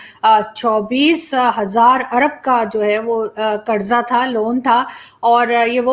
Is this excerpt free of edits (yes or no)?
yes